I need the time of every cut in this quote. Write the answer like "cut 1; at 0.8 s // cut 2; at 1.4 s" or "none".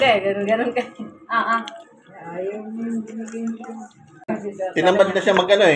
cut 1; at 4.2 s